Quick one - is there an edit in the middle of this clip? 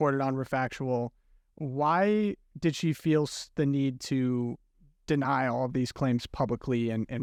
no; 0 cuts

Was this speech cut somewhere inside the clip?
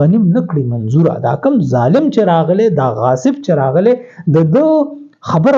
no; 0 cuts

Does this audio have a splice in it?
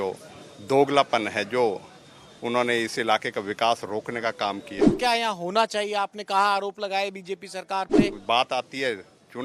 yes; 2 cuts; at 5.0 s, 8.2 s

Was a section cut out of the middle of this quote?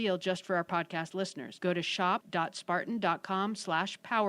yes; 2 cuts; at 1.4 s, 2.3 s

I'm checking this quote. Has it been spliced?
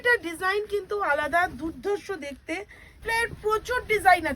yes; 1 cut; at 3.0 s

